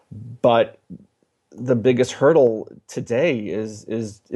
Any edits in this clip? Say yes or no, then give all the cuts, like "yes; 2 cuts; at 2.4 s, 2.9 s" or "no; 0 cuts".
no; 0 cuts